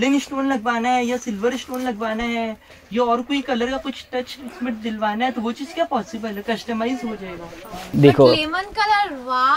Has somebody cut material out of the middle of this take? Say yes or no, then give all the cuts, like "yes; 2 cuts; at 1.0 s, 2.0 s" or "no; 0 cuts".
yes; 1 cut; at 7.8 s